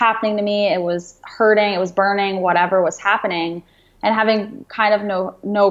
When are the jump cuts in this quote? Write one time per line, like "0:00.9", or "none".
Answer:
none